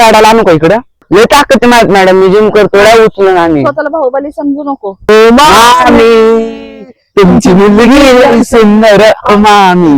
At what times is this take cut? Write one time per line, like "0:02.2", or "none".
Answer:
0:01.0
0:05.0